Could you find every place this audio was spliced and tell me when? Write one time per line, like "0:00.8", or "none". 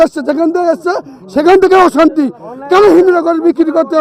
none